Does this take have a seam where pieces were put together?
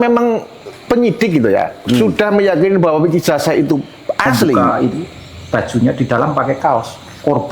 yes; 1 cut; at 4.7 s

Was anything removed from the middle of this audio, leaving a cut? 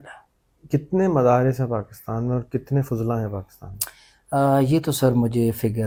no; 0 cuts

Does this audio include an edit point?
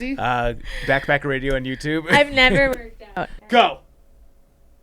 yes; 1 cut; at 3.4 s

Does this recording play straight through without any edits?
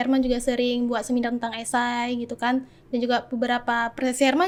yes; 0 cuts

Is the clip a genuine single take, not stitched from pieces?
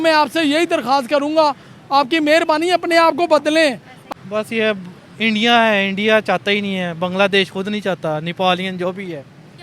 no; 1 cut; at 4.0 s

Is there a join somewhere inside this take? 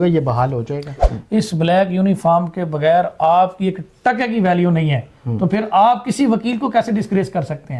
yes; 1 cut; at 0.9 s

